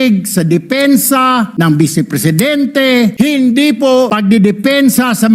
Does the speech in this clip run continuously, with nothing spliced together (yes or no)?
no